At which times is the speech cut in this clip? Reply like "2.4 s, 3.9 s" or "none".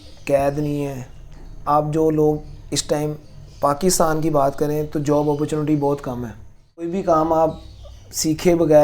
6.9 s